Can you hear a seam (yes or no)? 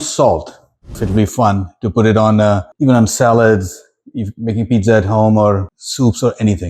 yes